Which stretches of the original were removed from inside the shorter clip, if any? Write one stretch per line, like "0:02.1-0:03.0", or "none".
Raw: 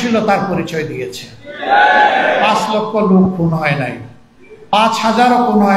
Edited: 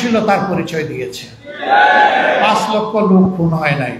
none